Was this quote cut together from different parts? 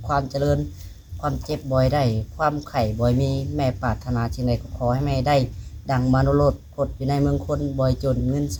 no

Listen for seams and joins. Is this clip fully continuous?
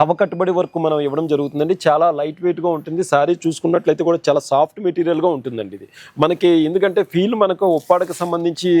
yes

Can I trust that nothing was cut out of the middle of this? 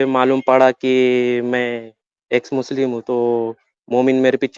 yes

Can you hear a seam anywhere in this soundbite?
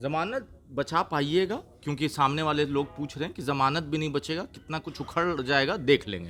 no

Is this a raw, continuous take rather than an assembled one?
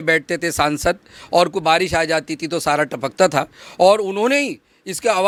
yes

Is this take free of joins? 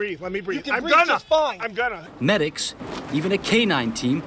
no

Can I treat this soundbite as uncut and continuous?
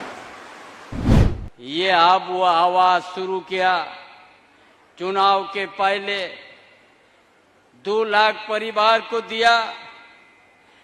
no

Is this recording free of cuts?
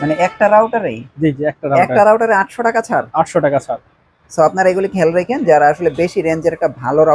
yes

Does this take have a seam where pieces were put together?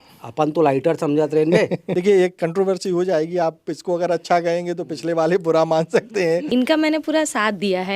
yes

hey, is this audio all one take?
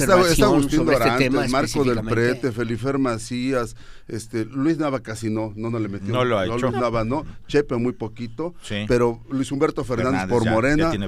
yes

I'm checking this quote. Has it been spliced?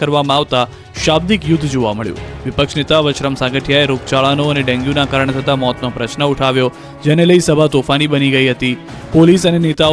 yes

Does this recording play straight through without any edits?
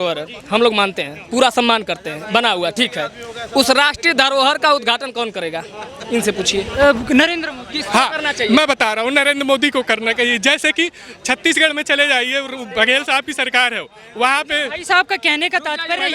yes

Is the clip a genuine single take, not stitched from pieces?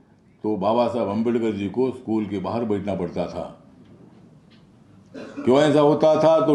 yes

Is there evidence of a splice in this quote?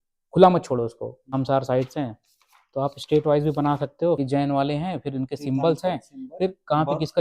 yes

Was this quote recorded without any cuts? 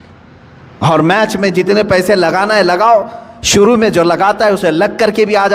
yes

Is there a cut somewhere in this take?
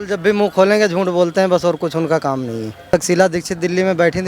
yes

